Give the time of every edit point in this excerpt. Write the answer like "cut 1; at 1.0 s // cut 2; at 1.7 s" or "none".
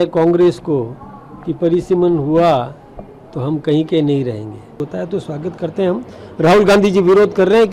cut 1; at 4.8 s